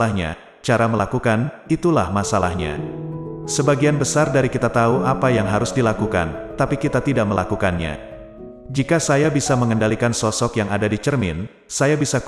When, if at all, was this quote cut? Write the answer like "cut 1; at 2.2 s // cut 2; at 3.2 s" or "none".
none